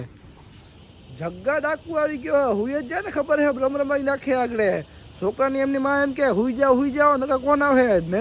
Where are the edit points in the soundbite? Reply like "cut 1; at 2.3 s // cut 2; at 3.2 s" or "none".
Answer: cut 1; at 2.6 s // cut 2; at 4.9 s